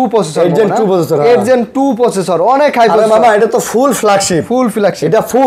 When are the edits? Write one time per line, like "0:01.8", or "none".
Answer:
none